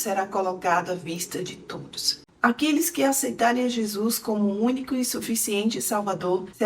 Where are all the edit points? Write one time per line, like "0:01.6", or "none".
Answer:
0:02.2

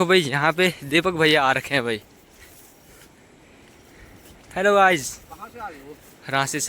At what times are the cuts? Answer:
none

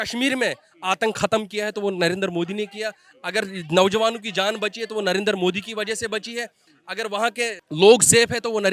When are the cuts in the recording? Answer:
0:07.6

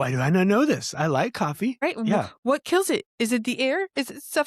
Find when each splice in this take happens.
0:01.8

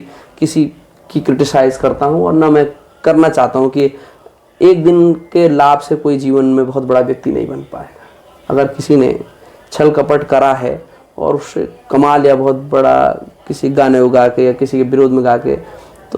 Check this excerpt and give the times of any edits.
none

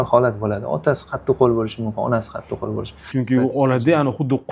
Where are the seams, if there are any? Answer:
0:03.1

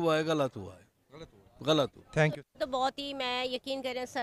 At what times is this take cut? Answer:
0:02.3

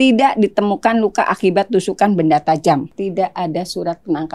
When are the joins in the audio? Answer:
0:03.0

